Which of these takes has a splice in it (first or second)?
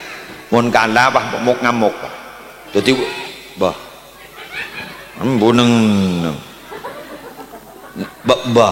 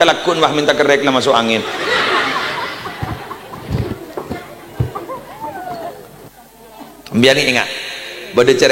second